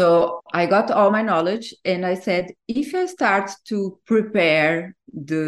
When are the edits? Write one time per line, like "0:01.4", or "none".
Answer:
none